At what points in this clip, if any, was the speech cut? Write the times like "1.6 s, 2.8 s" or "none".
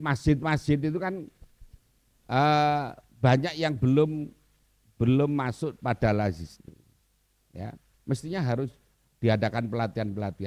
none